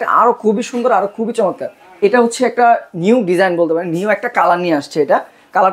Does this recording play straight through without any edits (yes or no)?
yes